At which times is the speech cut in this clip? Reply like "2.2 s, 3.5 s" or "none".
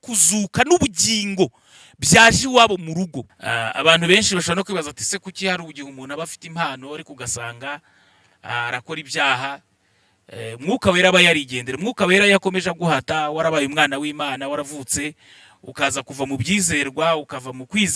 3.2 s

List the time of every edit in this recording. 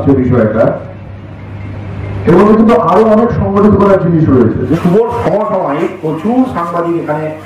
4.8 s

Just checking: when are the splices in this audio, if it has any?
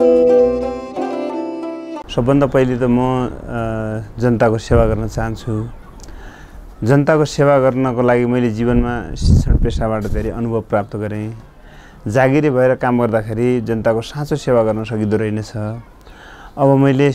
2.1 s

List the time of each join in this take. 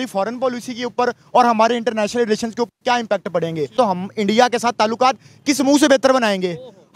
3.8 s

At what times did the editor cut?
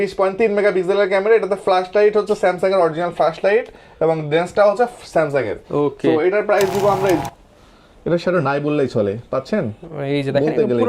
7.2 s

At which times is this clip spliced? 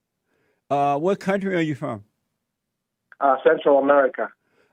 none

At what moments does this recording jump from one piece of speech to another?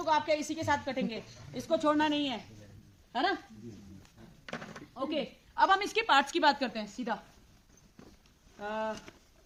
none

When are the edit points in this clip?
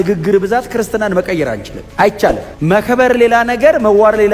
none

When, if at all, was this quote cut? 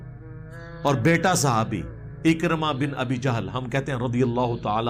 none

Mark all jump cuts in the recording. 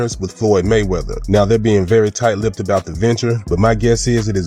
none

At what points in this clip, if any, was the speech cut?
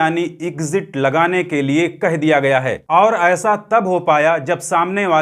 2.7 s

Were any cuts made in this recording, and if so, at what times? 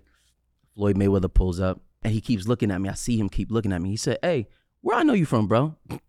1.9 s

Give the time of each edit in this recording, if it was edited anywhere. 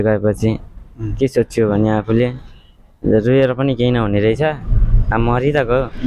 none

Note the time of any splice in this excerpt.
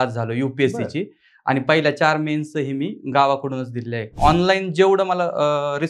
4.1 s

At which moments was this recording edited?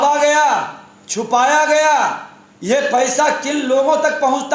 none

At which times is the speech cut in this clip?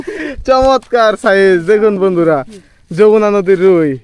none

